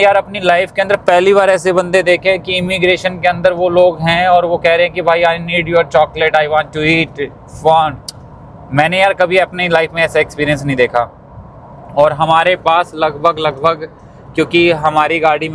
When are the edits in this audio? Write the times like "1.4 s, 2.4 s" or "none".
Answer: none